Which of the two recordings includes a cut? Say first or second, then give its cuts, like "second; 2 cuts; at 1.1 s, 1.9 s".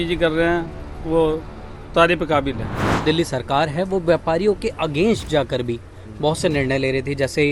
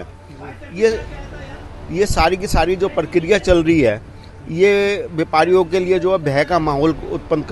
first; 1 cut; at 3.0 s